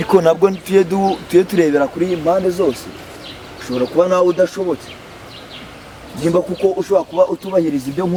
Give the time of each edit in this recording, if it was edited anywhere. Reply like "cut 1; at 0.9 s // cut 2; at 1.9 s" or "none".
none